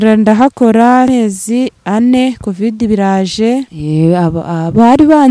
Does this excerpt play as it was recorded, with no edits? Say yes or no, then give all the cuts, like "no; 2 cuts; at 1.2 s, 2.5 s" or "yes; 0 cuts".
no; 2 cuts; at 1.1 s, 3.8 s